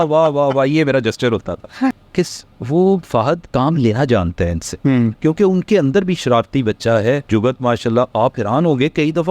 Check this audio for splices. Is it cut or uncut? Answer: cut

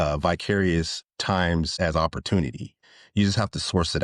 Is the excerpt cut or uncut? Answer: cut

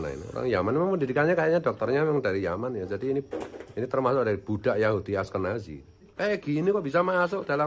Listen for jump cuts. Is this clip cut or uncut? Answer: cut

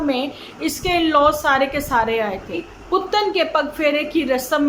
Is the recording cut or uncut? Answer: cut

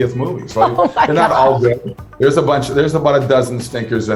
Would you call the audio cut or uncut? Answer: uncut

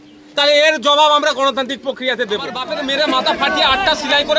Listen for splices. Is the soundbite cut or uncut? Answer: cut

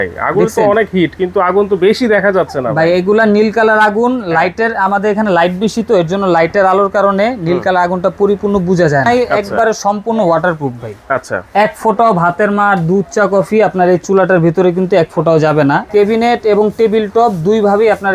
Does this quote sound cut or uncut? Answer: cut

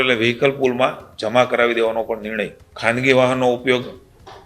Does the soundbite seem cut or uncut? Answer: cut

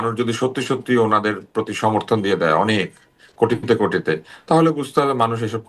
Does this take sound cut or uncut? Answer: uncut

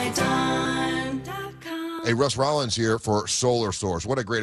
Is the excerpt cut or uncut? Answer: cut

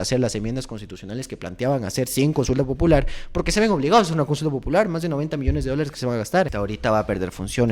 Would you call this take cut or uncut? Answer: cut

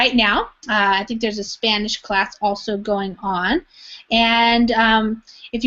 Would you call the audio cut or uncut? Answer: cut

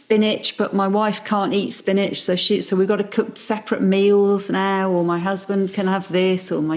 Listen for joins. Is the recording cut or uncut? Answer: uncut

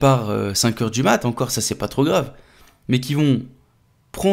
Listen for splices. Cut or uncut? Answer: uncut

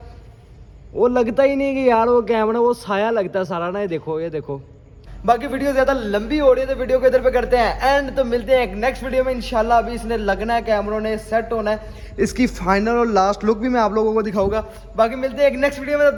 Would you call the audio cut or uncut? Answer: uncut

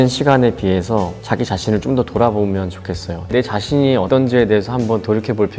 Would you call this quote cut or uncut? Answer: cut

